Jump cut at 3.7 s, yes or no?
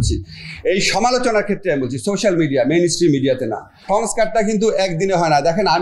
yes